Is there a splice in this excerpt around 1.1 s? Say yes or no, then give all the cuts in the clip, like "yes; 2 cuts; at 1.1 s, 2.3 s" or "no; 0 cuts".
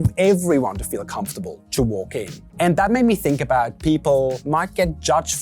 no; 2 cuts; at 2.4 s, 4.4 s